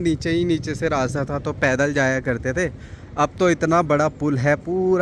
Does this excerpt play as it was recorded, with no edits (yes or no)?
yes